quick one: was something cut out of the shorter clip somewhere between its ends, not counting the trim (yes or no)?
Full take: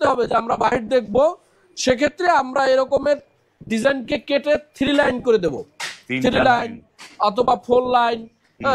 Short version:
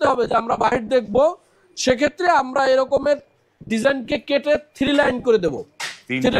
no